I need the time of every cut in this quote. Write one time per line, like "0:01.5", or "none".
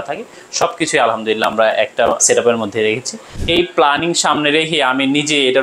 0:02.2
0:03.3